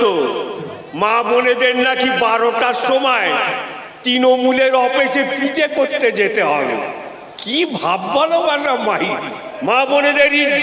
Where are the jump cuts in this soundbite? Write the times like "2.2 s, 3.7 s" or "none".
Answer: 9.5 s